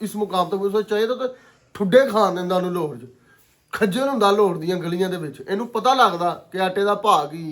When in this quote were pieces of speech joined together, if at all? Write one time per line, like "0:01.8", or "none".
none